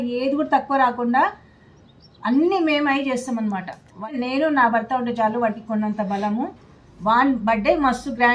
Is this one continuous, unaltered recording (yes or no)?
no